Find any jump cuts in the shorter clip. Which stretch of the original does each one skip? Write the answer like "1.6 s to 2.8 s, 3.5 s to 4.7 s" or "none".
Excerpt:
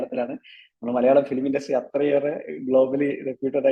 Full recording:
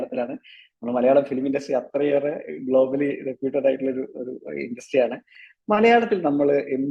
none